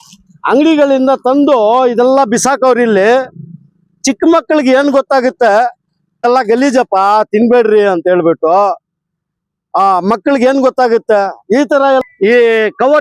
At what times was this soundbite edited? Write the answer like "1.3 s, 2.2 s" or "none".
6.2 s, 12.0 s